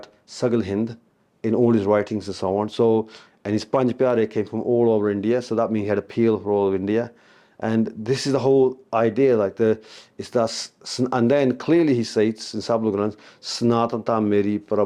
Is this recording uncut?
yes; 0 cuts

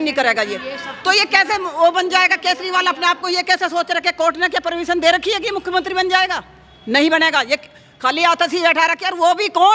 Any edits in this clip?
no; 0 cuts

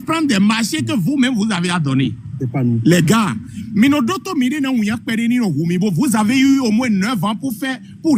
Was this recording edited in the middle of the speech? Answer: no; 0 cuts

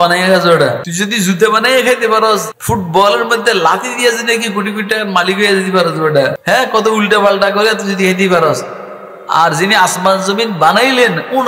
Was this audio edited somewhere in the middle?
yes; 3 cuts; at 0.9 s, 2.5 s, 6.4 s

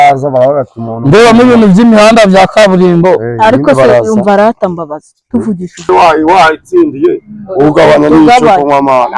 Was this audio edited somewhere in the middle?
yes; 1 cut; at 5.9 s

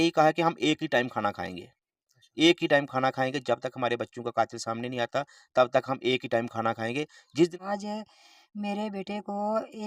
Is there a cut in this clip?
yes; 1 cut; at 7.5 s

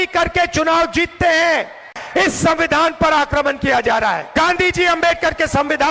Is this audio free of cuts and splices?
no; 2 cuts; at 1.9 s, 4.2 s

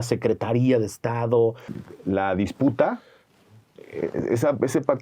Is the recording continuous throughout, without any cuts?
no; 1 cut; at 1.7 s

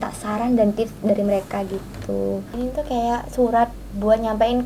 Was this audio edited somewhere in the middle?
yes; 1 cut; at 2.5 s

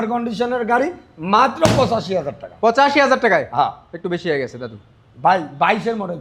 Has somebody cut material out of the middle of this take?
no; 0 cuts

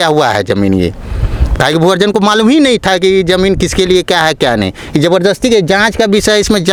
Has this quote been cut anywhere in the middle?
no; 0 cuts

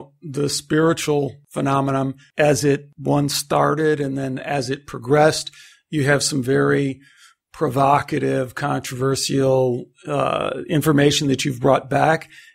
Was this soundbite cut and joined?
yes; 2 cuts; at 1.8 s, 2.9 s

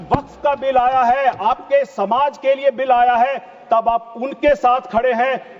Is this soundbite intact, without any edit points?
yes; 0 cuts

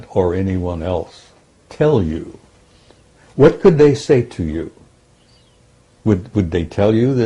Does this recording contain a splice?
no; 0 cuts

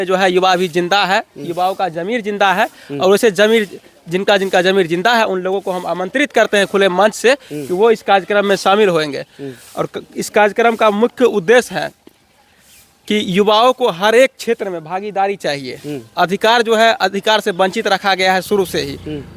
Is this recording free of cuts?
yes; 0 cuts

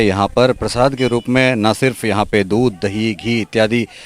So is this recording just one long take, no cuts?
yes; 0 cuts

